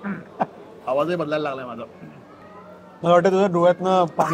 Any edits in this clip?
no; 0 cuts

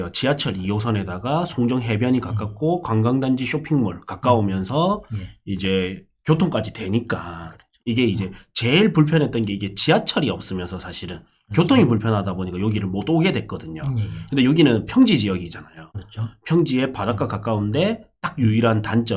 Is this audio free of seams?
yes; 0 cuts

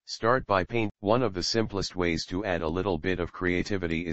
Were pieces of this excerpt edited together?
yes; 1 cut; at 0.9 s

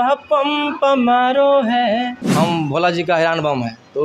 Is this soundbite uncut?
no; 1 cut; at 2.2 s

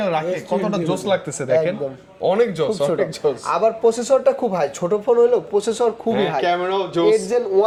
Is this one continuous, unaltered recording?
yes; 0 cuts

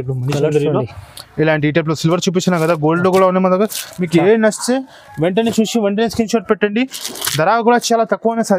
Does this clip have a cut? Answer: no; 0 cuts

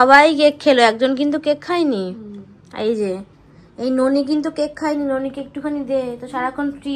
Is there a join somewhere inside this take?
no; 0 cuts

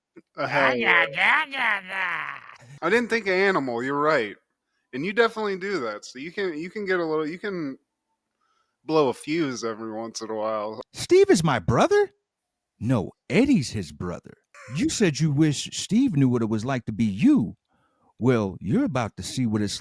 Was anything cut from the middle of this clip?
yes; 1 cut; at 10.7 s

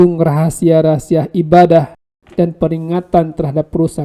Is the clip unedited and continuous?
no; 1 cut; at 2.0 s

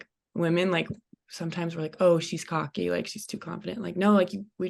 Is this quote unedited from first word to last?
yes; 0 cuts

